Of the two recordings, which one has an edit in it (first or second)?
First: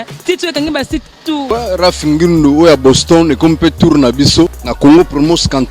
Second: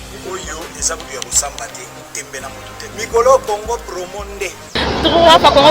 first